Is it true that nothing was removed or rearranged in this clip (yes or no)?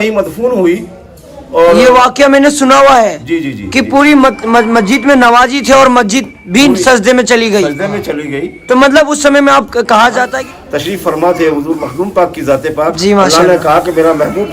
no